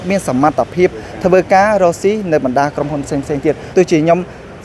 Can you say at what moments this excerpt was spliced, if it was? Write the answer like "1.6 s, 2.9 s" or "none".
3.6 s